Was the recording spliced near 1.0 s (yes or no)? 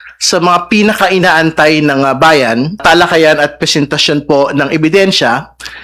no